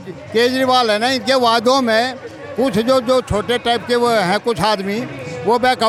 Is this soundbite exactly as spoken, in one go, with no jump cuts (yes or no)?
yes